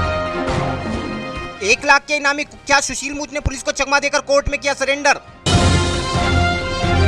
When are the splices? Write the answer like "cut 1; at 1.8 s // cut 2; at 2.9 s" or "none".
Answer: none